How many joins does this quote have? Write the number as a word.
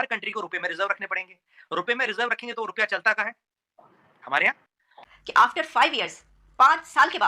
one